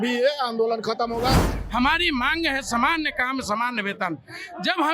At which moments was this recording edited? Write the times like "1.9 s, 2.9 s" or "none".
1.5 s